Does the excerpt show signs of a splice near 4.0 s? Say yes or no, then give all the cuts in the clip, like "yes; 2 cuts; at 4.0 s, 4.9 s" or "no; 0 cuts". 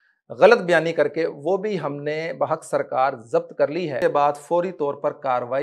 yes; 1 cut; at 4.0 s